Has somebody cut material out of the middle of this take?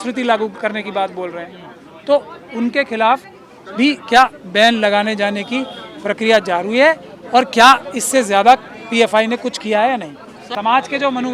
yes; 1 cut; at 10.4 s

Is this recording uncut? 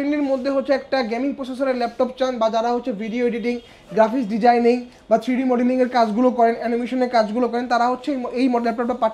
yes; 0 cuts

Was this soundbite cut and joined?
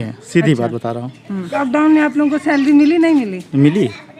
yes; 1 cut; at 1.6 s

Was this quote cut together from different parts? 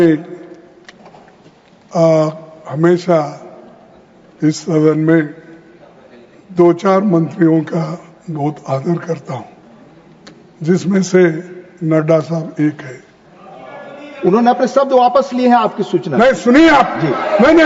no; 0 cuts

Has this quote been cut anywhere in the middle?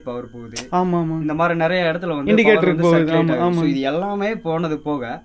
no; 0 cuts

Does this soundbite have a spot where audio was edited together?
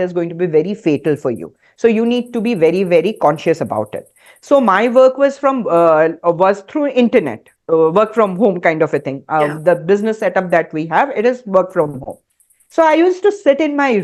no; 0 cuts

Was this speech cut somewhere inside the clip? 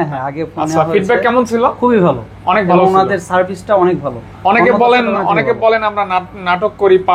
no; 0 cuts

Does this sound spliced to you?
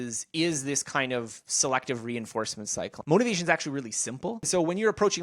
yes; 2 cuts; at 2.9 s, 4.4 s

